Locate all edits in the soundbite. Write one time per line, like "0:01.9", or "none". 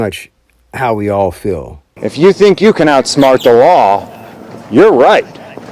0:01.9